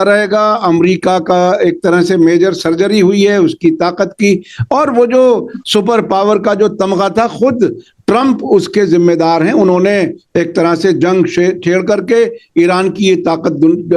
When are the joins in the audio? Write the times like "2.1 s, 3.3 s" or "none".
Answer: none